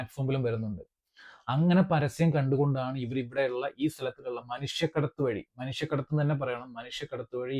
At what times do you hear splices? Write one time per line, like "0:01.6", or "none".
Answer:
none